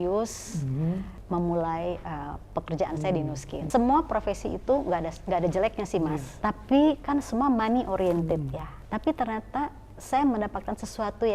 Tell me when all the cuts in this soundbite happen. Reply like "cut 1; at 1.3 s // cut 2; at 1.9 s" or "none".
cut 1; at 1.1 s // cut 2; at 3.6 s // cut 3; at 6.3 s // cut 4; at 8.8 s